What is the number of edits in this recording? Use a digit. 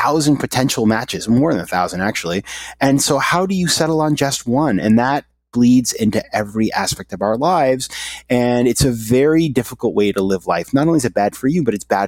0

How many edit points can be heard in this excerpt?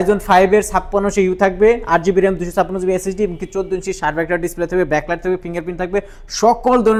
0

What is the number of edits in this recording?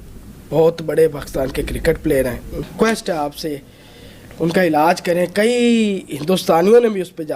1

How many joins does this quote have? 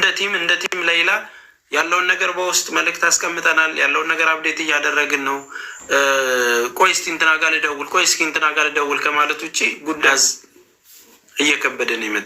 1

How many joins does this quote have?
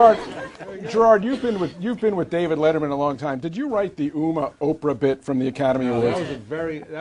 1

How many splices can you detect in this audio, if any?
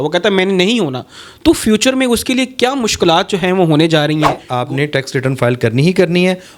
1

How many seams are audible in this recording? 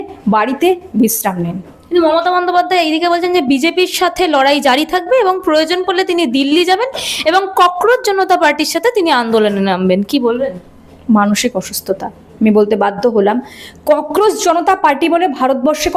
0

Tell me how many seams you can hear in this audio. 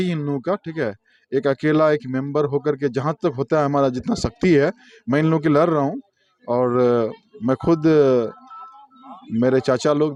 0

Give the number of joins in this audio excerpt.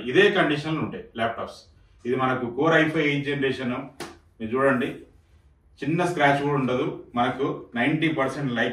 0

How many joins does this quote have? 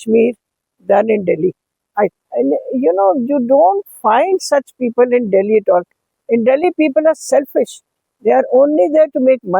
1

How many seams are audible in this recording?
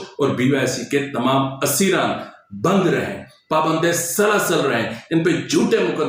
0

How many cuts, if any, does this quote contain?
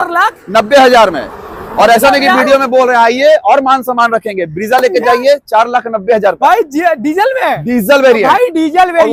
0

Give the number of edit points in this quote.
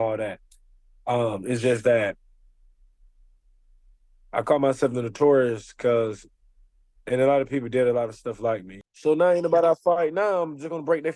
1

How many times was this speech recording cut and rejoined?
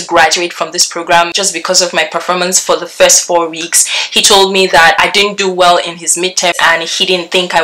2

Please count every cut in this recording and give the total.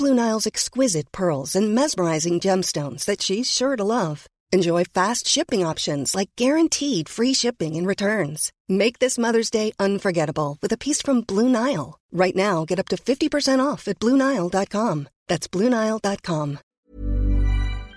1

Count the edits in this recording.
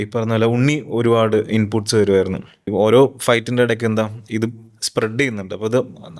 1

